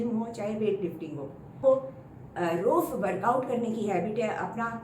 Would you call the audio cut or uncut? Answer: cut